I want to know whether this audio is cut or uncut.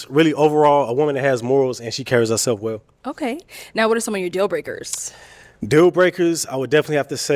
uncut